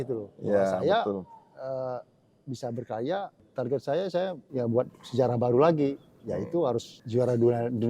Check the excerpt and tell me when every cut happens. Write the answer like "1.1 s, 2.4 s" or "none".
3.4 s, 4.4 s, 6.9 s